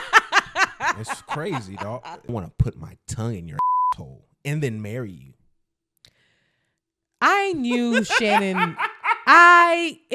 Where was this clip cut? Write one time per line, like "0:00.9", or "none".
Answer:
0:02.3

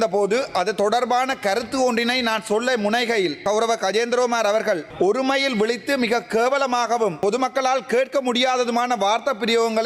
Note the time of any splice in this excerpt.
0:03.4
0:04.9
0:07.2

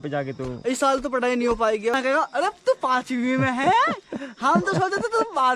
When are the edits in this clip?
0:01.9

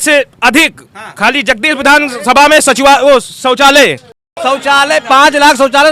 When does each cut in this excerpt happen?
0:04.1

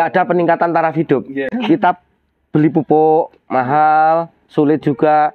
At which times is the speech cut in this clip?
0:01.5

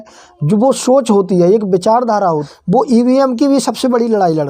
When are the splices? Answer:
0:02.5

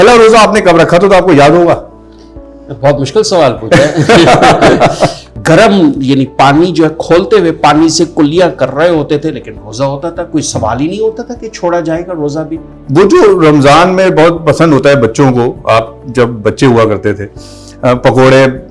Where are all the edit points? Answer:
0:05.3
0:12.8

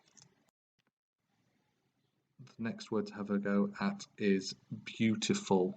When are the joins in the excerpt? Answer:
0:04.3

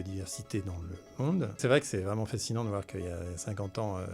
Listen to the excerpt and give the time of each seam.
0:01.6

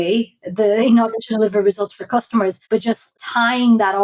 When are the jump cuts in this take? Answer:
0:02.9

